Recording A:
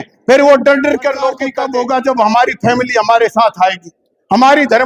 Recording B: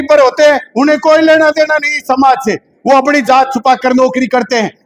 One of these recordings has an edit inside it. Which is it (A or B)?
A